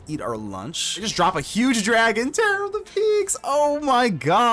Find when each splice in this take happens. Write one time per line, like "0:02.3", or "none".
0:01.0